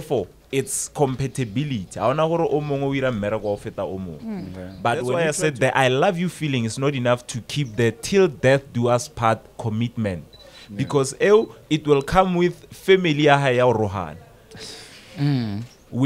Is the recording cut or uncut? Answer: cut